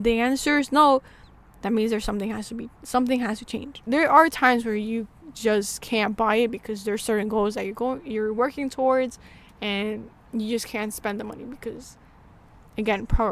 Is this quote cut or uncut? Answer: cut